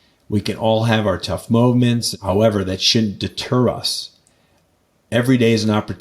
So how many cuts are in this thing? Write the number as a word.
one